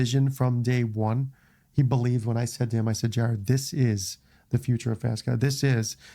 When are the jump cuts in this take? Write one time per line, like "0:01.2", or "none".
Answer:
none